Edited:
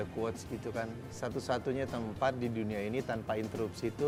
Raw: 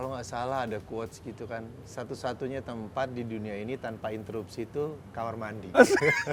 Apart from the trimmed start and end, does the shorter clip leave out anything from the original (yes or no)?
no